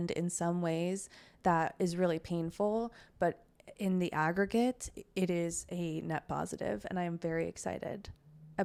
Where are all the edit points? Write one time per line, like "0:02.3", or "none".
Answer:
none